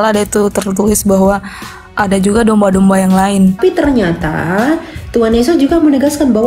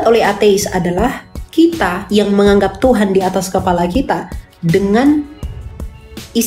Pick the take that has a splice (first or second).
first